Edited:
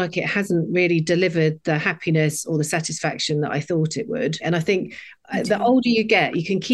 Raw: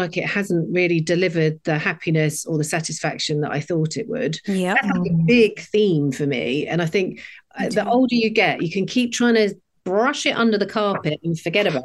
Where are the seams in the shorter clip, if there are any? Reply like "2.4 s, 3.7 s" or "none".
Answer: 4.4 s